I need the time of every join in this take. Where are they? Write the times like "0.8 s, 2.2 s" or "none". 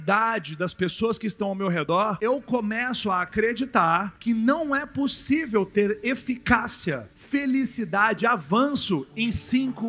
1.8 s, 4.1 s